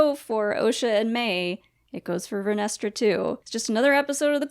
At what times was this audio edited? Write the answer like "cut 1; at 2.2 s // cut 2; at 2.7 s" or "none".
cut 1; at 3.5 s